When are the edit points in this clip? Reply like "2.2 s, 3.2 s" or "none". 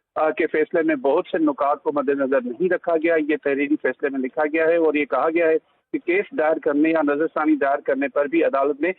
none